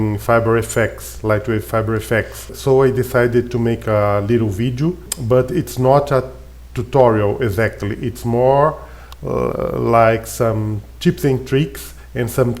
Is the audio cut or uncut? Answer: cut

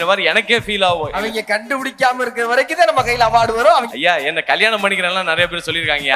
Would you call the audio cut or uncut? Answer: cut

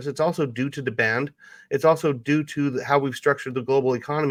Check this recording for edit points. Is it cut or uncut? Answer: uncut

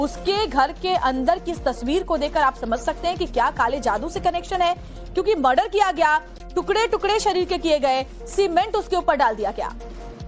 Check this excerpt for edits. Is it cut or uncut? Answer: uncut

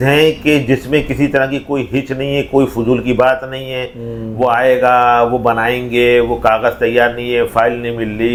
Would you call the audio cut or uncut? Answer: uncut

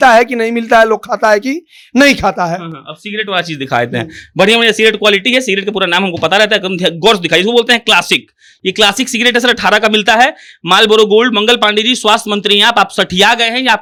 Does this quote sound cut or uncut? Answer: uncut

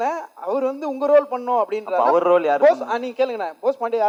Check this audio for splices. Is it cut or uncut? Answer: uncut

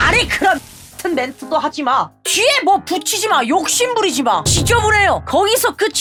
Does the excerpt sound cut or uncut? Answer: uncut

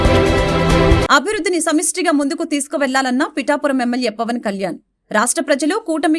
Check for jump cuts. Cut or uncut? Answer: cut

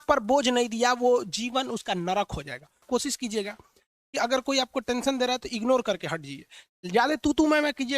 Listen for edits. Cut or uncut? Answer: cut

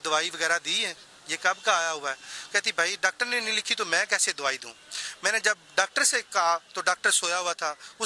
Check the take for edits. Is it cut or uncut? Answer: uncut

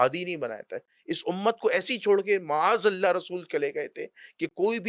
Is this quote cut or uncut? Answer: uncut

